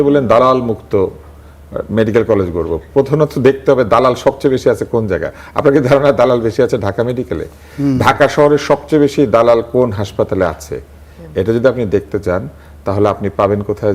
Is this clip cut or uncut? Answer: uncut